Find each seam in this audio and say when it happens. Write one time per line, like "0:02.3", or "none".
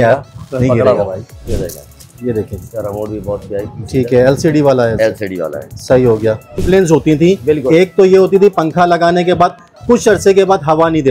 0:01.5
0:06.6